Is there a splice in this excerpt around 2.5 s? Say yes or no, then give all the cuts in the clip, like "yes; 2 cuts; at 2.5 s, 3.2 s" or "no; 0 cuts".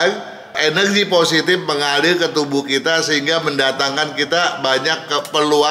no; 0 cuts